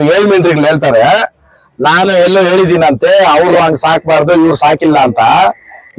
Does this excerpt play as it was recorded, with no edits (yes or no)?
yes